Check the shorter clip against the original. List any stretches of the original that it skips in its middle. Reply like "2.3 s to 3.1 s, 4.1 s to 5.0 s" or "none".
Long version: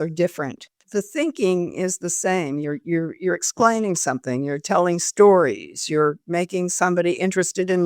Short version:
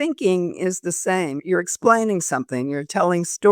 2.6 s to 3.1 s